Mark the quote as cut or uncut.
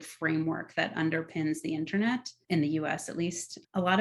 cut